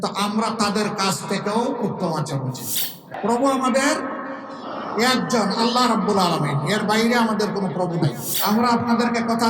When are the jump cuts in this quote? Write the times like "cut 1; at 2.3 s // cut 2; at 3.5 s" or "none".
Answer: cut 1; at 3.1 s // cut 2; at 8.3 s